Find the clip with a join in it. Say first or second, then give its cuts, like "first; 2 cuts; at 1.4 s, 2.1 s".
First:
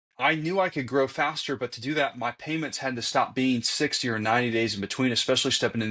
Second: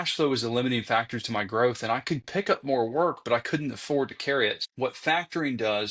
second; 1 cut; at 4.6 s